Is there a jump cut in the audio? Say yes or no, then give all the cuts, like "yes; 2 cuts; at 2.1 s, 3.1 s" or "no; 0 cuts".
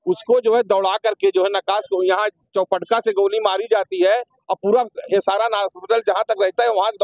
no; 0 cuts